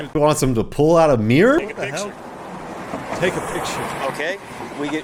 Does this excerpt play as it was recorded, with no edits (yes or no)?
yes